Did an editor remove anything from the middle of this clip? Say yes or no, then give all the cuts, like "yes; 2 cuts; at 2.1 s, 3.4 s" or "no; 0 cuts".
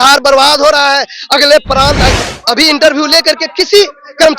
yes; 1 cut; at 2.1 s